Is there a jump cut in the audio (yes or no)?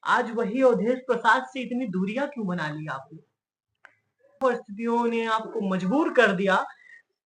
yes